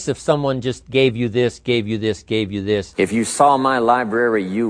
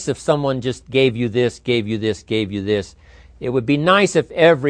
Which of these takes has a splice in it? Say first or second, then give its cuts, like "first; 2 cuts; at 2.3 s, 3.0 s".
first; 1 cut; at 2.9 s